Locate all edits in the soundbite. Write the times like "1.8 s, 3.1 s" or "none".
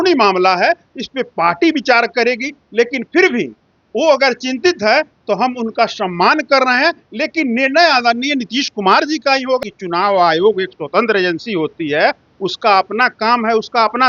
9.6 s